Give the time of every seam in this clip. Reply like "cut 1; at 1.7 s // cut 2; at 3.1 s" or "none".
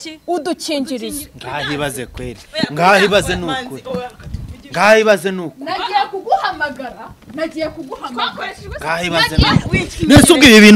none